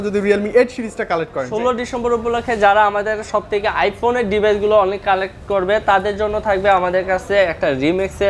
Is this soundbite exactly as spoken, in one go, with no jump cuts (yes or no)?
no